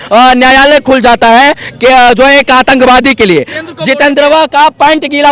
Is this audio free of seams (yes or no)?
no